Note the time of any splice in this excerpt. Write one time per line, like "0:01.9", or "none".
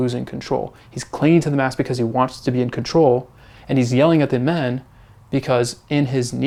none

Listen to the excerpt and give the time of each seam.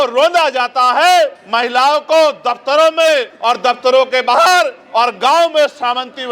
none

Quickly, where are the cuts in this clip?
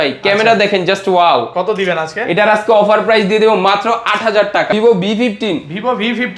0:04.7

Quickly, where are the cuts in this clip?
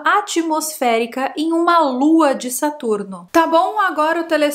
0:03.2

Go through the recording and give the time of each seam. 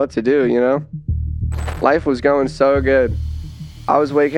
none

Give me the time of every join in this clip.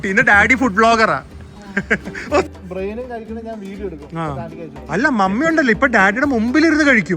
0:02.5

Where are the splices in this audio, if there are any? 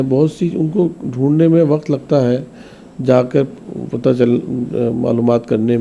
none

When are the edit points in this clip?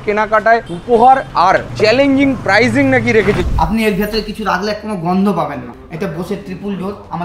0:03.4
0:05.8

